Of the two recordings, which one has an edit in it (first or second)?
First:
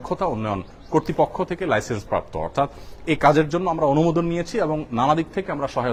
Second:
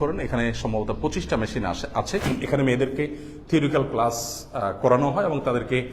second